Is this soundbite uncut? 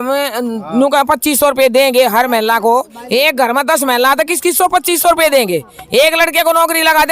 yes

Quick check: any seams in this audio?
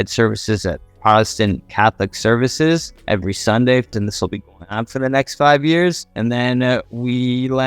yes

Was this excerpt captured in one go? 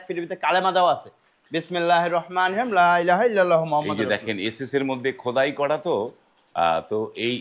yes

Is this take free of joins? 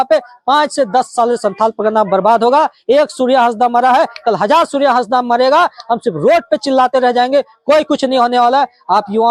yes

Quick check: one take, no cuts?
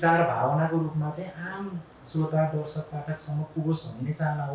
yes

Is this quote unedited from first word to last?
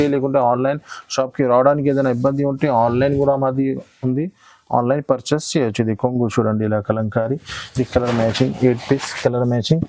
yes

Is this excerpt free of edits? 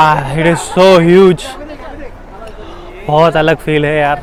yes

